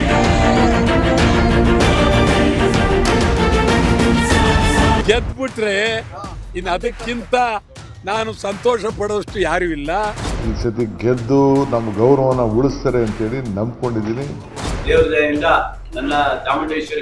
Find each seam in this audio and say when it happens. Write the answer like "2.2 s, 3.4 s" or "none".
5.0 s